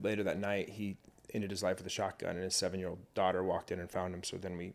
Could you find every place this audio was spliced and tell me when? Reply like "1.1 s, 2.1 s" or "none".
none